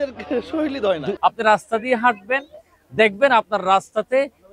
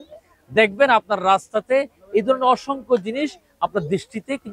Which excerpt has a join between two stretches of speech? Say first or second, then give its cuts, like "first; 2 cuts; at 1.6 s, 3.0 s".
first; 1 cut; at 1.2 s